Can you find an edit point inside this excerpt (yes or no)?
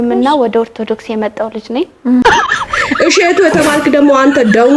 yes